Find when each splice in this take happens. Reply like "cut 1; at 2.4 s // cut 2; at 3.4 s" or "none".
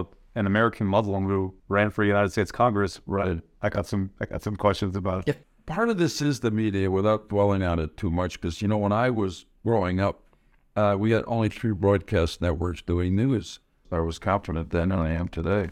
cut 1; at 1.6 s // cut 2; at 5.4 s // cut 3; at 13.8 s